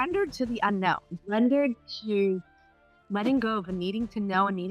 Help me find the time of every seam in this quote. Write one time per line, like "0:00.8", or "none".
0:01.1